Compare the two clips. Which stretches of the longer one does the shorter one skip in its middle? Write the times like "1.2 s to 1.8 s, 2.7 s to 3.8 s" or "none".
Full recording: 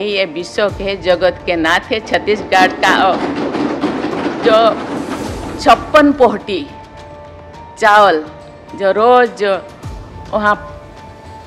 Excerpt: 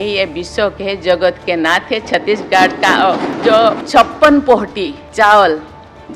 3.4 s to 5.1 s, 6.7 s to 7.6 s